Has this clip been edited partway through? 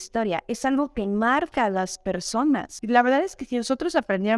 yes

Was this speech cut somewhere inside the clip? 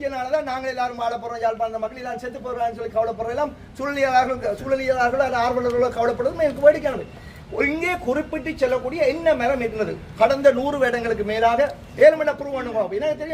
no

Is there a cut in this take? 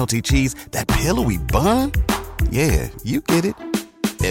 no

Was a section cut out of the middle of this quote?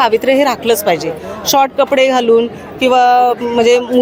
no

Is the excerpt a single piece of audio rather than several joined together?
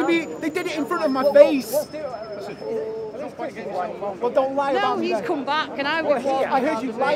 yes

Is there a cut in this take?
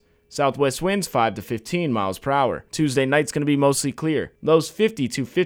yes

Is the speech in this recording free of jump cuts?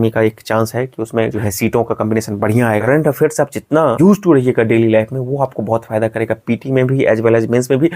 no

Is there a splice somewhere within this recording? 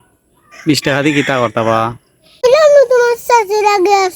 yes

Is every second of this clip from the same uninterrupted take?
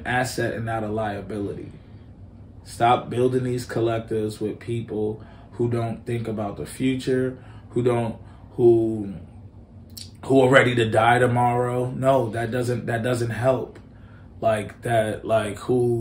yes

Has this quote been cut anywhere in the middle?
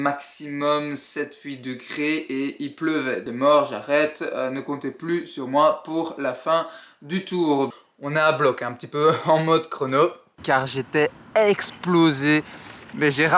yes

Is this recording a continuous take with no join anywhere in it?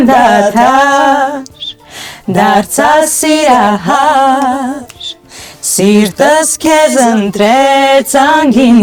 yes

